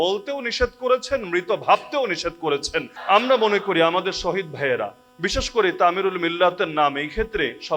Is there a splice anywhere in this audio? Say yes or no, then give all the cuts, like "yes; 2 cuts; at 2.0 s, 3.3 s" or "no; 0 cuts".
yes; 1 cut; at 2.9 s